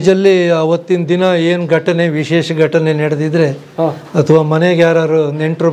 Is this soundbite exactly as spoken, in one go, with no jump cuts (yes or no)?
yes